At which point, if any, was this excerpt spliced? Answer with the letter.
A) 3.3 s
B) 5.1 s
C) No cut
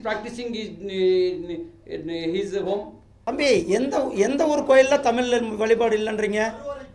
A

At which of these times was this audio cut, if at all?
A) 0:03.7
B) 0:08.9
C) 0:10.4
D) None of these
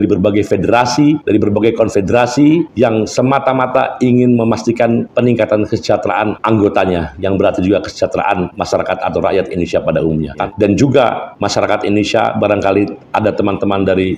C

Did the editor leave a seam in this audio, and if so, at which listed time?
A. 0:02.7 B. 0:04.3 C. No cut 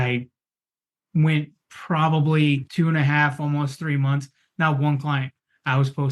A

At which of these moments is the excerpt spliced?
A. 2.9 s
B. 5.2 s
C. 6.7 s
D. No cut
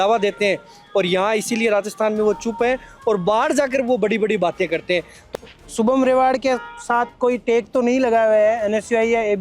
B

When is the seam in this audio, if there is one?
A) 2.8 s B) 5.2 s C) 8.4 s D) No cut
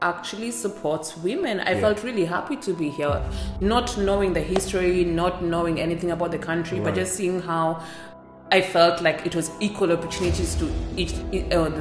D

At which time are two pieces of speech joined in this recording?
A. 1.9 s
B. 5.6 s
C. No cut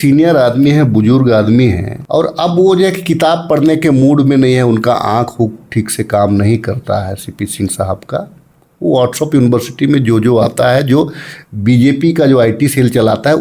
A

